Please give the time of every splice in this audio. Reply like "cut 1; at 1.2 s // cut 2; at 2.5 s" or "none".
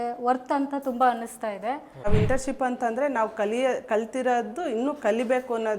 cut 1; at 2.1 s